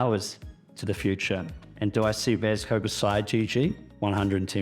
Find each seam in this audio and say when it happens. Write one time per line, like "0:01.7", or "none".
none